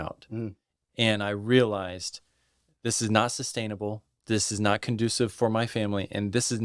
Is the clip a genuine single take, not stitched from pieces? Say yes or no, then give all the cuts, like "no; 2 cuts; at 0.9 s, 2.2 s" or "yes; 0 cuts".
yes; 0 cuts